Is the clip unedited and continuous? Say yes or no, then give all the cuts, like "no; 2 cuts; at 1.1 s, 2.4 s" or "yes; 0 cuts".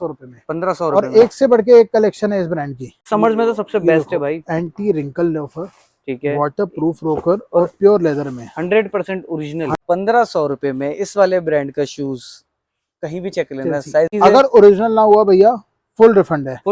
no; 3 cuts; at 3.1 s, 9.8 s, 14.1 s